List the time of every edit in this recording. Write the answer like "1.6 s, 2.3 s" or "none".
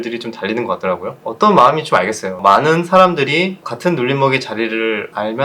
1.2 s, 2.3 s